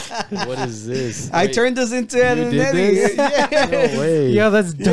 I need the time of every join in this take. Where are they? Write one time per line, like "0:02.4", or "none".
none